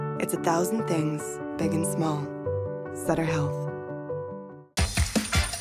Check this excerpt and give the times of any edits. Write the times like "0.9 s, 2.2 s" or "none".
none